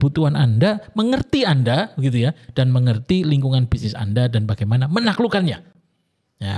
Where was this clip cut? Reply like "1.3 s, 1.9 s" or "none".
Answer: none

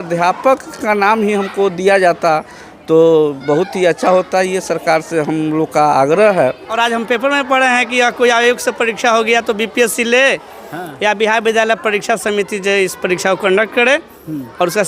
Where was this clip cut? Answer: 6.7 s

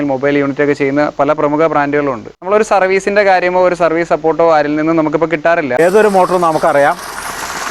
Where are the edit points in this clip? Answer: 2.3 s, 5.8 s

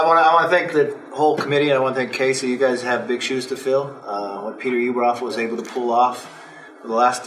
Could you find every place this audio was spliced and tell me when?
none

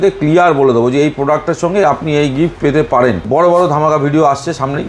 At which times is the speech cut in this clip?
3.2 s

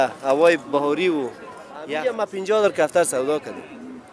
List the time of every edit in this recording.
1.9 s

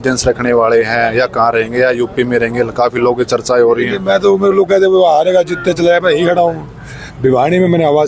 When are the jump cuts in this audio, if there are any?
none

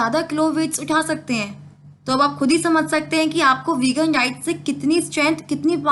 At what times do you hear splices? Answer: none

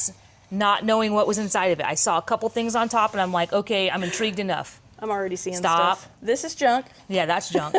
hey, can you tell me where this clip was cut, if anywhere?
none

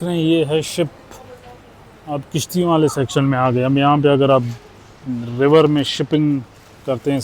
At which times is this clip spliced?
none

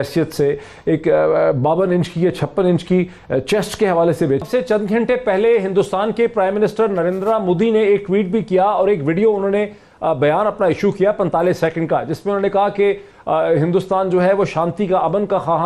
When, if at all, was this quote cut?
4.4 s

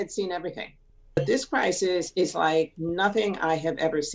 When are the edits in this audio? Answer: 1.2 s

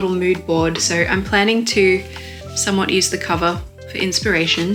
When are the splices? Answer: none

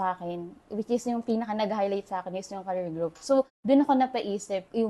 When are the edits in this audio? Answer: none

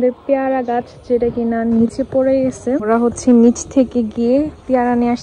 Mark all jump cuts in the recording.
2.9 s

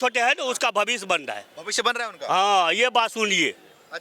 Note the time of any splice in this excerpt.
none

